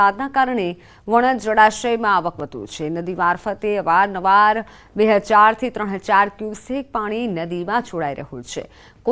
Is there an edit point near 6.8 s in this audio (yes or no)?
no